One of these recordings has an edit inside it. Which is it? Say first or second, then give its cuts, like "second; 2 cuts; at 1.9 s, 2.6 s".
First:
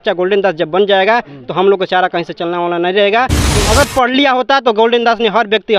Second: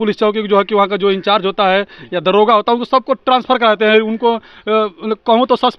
first; 1 cut; at 3.4 s